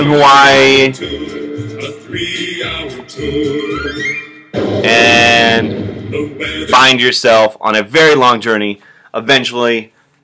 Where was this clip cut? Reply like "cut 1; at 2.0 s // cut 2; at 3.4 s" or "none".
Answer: cut 1; at 6.9 s

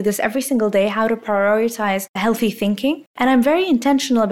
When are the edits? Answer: cut 1; at 2.2 s // cut 2; at 3.1 s

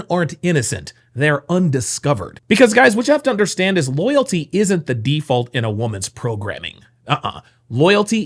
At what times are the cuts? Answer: cut 1; at 2.3 s

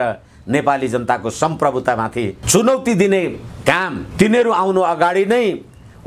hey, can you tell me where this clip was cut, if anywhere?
cut 1; at 4.0 s

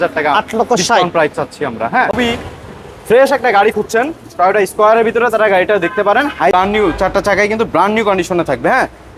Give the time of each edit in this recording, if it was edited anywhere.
cut 1; at 2.1 s // cut 2; at 6.5 s

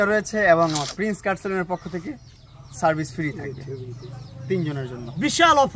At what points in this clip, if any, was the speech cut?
none

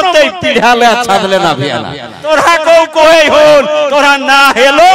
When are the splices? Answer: cut 1; at 2.2 s

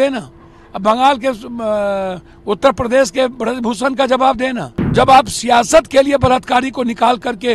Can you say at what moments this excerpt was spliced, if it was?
cut 1; at 4.9 s

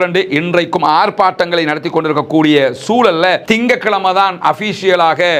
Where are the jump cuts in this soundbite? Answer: cut 1; at 3.4 s

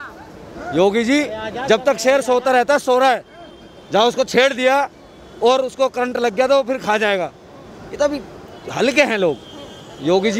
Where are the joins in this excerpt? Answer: none

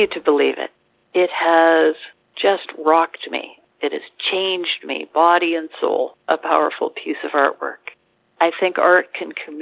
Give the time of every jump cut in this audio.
cut 1; at 0.9 s

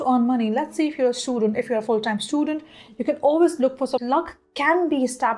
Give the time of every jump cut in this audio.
cut 1; at 4.0 s

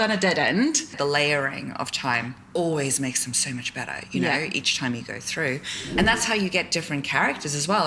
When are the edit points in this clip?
cut 1; at 0.9 s // cut 2; at 5.8 s

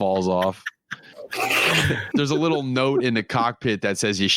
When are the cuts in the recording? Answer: cut 1; at 2.0 s

